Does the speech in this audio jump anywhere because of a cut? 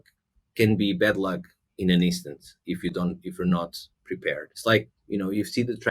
yes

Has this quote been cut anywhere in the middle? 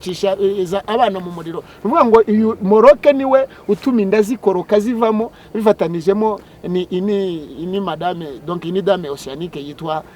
no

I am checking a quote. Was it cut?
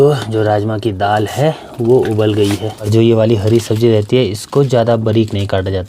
yes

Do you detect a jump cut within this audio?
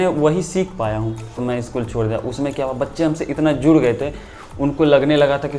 yes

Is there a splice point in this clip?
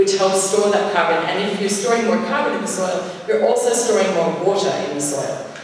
no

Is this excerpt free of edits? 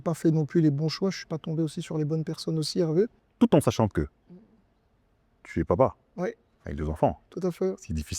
no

